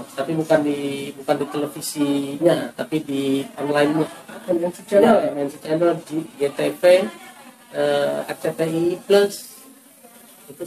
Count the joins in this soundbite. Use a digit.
0